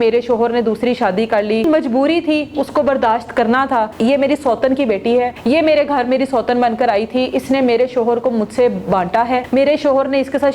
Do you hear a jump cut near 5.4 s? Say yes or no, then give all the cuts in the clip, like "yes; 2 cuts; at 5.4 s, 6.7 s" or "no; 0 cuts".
yes; 4 cuts; at 1.6 s, 3.9 s, 5.4 s, 9.4 s